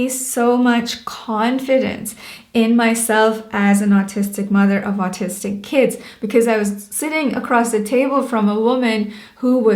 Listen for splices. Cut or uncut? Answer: uncut